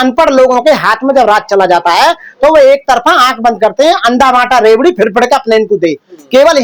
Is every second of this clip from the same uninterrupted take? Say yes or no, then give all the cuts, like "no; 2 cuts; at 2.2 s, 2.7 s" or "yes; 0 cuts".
yes; 0 cuts